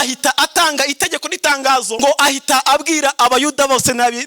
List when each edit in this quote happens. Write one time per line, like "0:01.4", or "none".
0:01.9